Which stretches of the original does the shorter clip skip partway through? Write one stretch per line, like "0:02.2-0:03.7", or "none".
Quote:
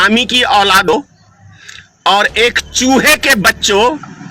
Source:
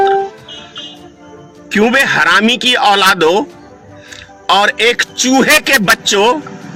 0:03.2-0:03.3